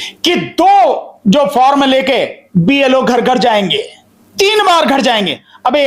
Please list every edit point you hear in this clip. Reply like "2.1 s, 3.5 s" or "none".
none